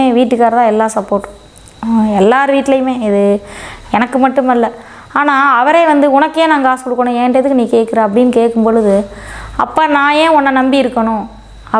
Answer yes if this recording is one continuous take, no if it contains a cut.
yes